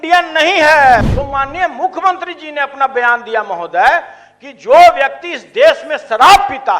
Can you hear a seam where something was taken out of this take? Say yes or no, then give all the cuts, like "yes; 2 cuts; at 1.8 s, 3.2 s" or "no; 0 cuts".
yes; 1 cut; at 1.0 s